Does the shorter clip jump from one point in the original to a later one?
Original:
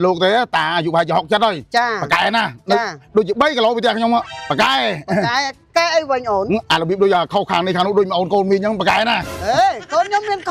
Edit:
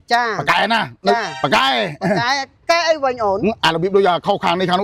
yes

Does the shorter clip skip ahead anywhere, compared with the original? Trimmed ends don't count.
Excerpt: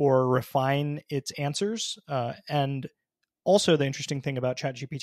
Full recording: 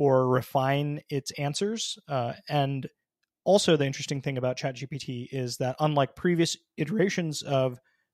no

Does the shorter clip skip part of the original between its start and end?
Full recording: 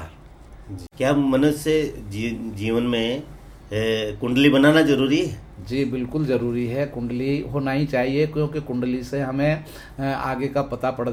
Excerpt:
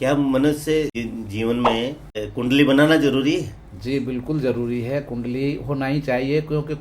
yes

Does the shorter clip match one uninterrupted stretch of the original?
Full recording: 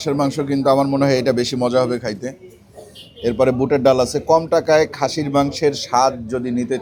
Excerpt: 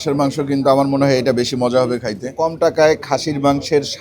no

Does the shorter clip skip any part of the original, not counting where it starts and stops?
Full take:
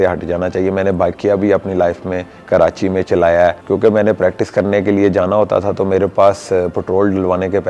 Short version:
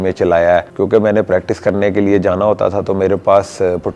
no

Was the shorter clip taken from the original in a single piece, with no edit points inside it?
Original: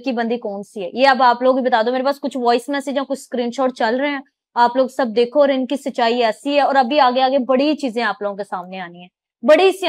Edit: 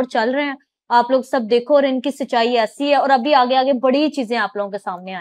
yes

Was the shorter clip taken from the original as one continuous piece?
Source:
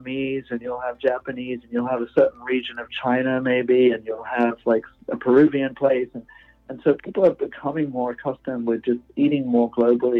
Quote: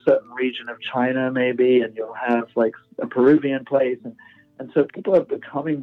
yes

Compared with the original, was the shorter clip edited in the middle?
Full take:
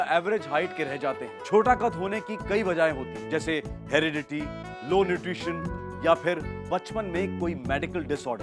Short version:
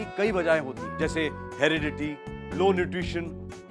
no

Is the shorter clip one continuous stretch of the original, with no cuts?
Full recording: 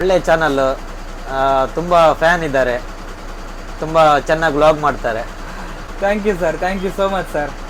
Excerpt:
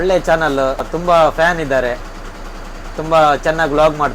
no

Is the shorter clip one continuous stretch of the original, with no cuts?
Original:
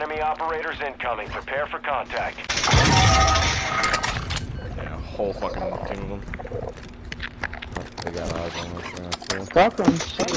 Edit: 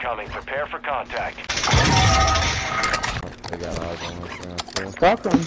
no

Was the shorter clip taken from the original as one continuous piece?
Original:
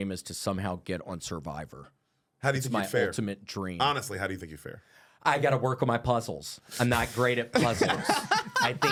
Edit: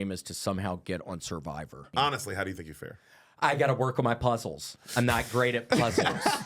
no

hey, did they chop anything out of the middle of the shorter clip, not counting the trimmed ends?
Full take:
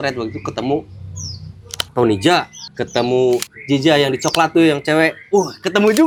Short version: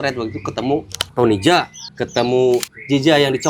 yes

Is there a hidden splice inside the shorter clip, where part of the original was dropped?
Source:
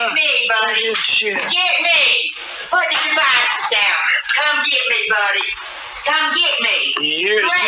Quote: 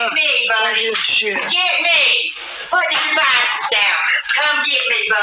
no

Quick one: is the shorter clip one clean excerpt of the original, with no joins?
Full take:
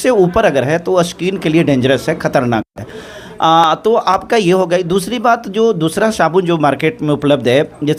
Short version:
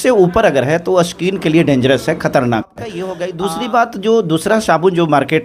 no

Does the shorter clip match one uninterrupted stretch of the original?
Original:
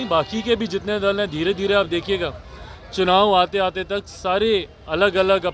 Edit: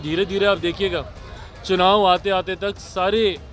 yes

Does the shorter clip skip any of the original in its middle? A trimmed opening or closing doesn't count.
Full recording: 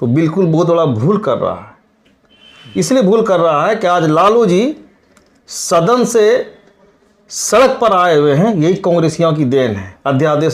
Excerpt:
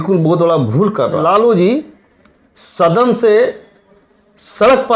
yes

